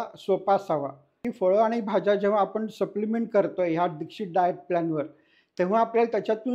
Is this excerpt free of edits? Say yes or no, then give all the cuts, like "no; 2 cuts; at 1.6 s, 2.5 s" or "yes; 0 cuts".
no; 1 cut; at 1.2 s